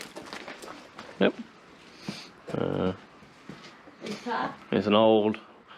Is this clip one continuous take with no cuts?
yes; 0 cuts

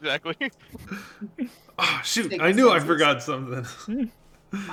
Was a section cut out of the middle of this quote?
no; 0 cuts

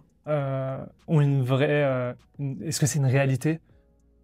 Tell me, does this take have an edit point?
no; 0 cuts

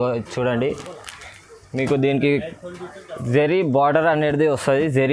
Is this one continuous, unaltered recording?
yes; 0 cuts

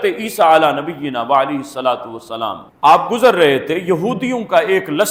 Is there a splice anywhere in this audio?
no; 0 cuts

